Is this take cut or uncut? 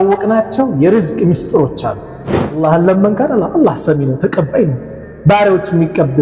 cut